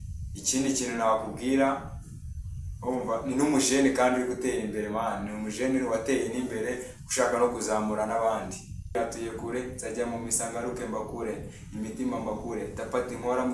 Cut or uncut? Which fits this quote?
cut